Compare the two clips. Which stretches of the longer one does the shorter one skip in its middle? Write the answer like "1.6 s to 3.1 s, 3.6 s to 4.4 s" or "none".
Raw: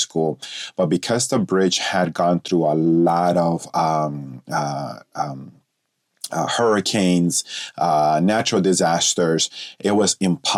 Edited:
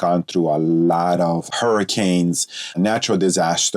3.7 s to 6.5 s, 7.7 s to 8.2 s